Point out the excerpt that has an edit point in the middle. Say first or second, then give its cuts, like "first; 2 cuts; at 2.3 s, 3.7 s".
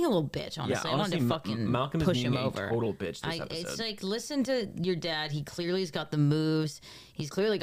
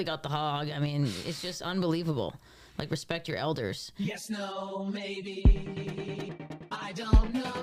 second; 1 cut; at 4.1 s